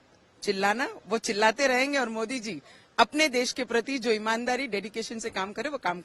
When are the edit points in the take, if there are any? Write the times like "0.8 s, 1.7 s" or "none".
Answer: none